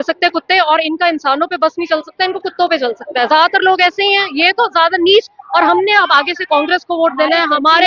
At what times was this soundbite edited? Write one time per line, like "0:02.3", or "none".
none